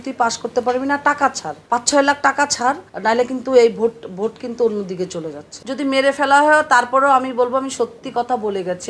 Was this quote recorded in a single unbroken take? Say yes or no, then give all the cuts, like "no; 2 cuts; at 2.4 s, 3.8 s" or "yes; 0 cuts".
no; 3 cuts; at 1.5 s, 2.9 s, 5.4 s